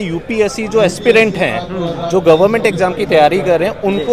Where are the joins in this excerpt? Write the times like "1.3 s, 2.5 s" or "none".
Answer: none